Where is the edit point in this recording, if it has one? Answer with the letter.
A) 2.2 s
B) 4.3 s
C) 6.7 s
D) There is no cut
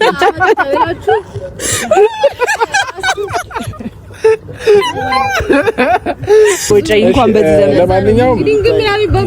C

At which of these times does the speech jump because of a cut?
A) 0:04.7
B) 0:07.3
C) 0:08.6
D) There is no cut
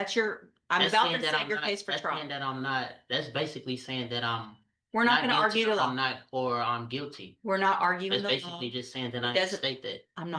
D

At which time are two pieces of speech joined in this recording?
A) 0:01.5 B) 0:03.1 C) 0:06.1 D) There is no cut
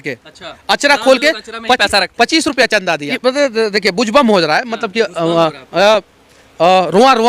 B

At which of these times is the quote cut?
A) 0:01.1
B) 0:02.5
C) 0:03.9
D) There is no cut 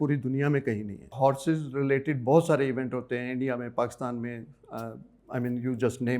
A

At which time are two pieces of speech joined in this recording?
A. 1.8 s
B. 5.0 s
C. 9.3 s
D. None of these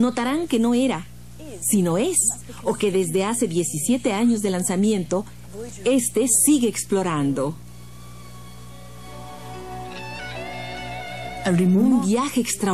B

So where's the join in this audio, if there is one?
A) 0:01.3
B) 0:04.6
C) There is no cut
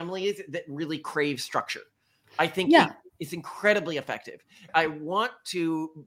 B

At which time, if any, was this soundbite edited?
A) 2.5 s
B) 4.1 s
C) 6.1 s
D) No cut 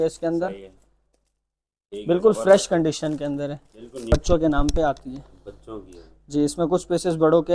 B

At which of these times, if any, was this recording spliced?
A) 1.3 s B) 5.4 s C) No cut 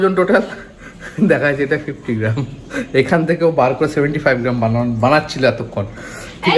C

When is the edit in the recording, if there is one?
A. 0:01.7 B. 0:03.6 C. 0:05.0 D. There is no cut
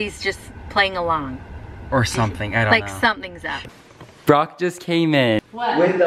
B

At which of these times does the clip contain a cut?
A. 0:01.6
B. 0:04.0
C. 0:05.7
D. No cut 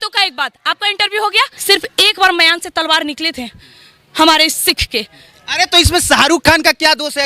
A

